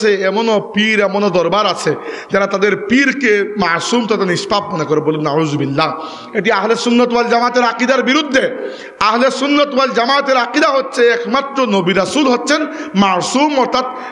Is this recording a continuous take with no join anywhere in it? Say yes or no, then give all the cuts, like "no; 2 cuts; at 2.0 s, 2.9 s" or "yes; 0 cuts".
yes; 0 cuts